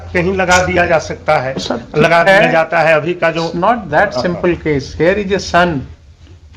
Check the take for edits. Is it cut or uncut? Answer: uncut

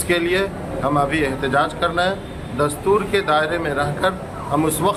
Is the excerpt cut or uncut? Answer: uncut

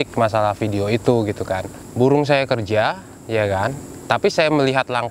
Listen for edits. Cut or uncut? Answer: cut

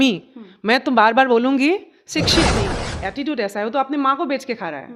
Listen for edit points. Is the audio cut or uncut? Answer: cut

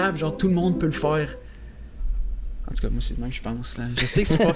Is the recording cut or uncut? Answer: uncut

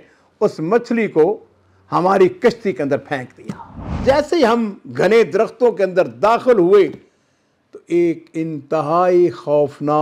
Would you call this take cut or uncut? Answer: cut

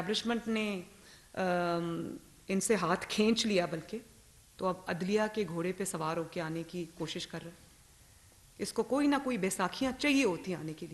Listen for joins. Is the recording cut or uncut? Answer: uncut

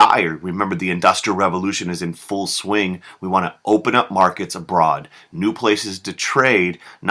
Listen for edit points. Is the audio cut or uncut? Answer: cut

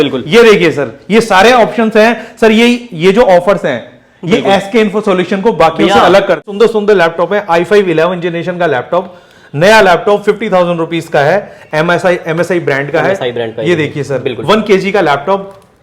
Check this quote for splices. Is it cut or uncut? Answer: cut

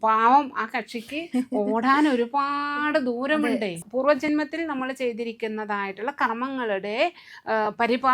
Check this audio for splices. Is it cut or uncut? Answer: cut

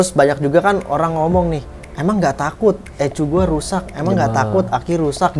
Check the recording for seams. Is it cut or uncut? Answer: uncut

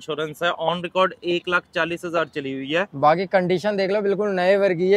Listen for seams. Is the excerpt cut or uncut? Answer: uncut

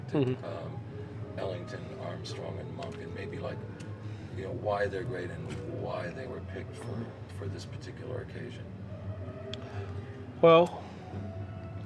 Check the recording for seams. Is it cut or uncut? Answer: cut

